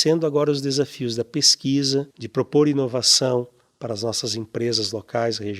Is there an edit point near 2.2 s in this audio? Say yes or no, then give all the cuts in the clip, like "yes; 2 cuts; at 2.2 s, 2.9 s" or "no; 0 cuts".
yes; 1 cut; at 2.2 s